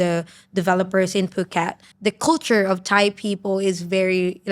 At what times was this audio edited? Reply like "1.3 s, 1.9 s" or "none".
1.8 s